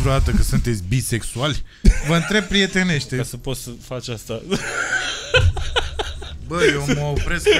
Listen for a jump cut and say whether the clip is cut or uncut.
cut